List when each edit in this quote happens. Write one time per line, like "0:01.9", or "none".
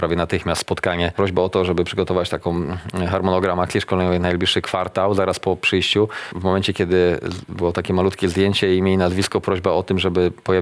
0:01.1
0:06.3